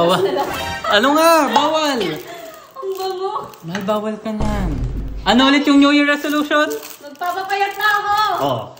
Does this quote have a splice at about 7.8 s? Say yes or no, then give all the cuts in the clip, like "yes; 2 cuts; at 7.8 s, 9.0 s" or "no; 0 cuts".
no; 1 cut; at 5.0 s